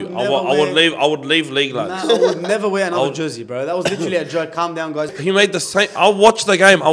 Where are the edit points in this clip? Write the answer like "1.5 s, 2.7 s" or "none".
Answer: 5.1 s